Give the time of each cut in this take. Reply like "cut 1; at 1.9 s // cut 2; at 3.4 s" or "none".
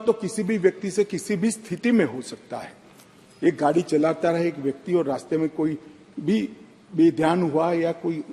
none